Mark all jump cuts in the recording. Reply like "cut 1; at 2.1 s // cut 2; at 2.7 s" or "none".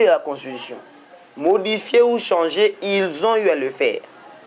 none